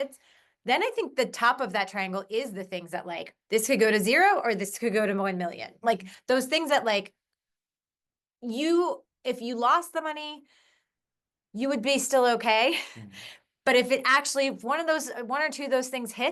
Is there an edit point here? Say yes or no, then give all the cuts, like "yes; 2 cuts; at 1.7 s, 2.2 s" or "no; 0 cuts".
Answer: no; 0 cuts